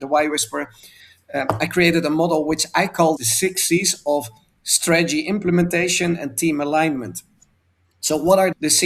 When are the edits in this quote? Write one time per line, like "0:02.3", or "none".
none